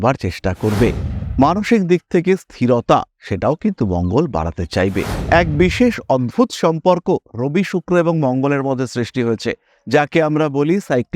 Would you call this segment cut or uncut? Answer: cut